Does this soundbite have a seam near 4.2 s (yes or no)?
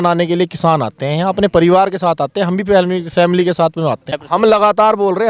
yes